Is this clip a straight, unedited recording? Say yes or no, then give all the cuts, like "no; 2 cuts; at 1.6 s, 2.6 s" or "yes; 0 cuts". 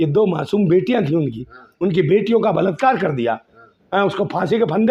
yes; 0 cuts